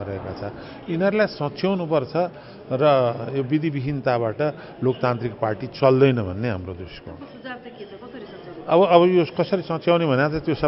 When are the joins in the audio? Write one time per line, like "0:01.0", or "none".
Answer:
none